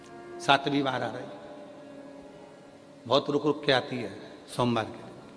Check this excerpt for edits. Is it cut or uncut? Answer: uncut